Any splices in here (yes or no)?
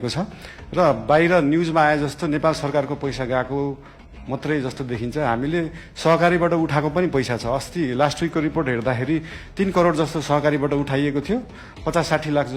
no